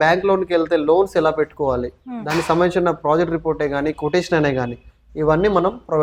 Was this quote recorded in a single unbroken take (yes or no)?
yes